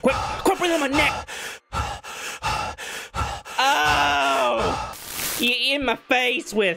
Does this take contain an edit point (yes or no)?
no